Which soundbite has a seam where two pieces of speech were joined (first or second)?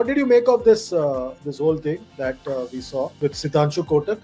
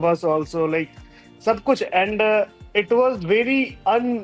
first